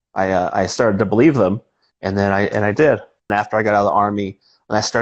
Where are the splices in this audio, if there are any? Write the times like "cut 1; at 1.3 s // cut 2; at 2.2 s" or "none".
cut 1; at 3.3 s